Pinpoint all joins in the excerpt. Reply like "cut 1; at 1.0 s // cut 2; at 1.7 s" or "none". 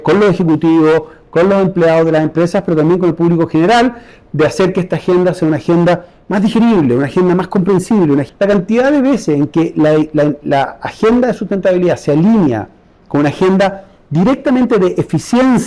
cut 1; at 8.2 s